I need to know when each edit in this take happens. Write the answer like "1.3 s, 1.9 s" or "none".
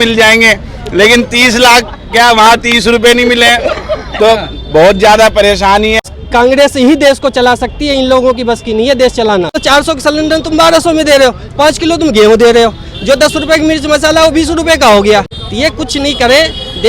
6.0 s, 9.6 s, 15.4 s

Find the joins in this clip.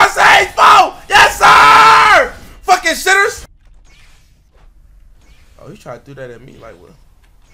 3.5 s

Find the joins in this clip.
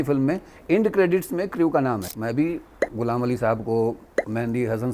2.1 s, 4.0 s

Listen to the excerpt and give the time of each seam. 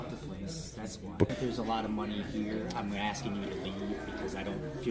1.3 s

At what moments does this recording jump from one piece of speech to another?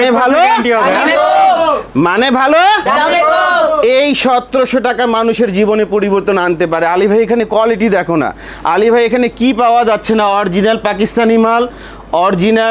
none

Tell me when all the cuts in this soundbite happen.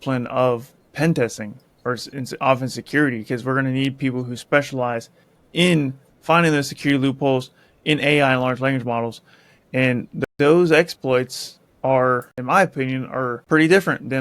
10.2 s, 12.3 s, 13.4 s

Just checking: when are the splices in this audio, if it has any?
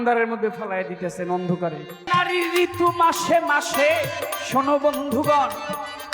2.0 s

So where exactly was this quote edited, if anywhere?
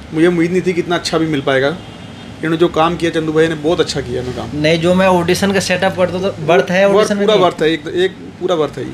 none

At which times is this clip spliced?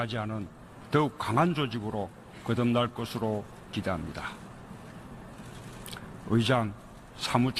3.8 s

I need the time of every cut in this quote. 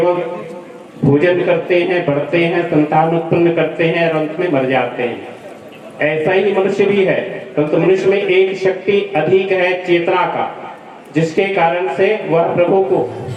none

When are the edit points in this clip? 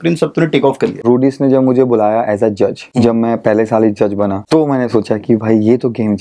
1.0 s, 2.8 s, 4.4 s

